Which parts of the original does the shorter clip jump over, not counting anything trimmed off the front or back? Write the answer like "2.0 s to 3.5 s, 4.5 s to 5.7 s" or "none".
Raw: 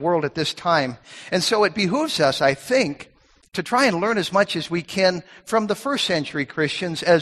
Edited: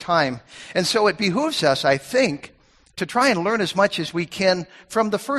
none